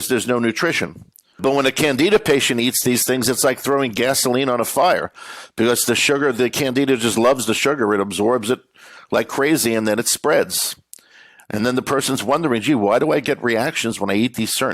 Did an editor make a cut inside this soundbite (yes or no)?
yes